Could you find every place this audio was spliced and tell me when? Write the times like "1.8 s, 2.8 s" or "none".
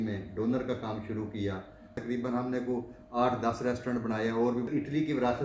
2.0 s, 4.7 s